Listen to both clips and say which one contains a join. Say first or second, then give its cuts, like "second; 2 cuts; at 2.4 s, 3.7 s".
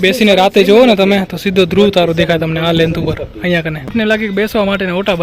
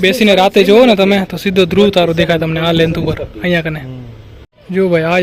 first; 1 cut; at 3.9 s